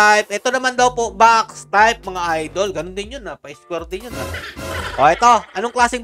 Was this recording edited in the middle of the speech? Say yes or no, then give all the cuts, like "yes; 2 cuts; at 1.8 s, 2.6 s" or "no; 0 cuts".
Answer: no; 0 cuts